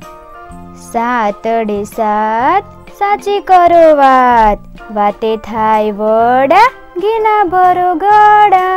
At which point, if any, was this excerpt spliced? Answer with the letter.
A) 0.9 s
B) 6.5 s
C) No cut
A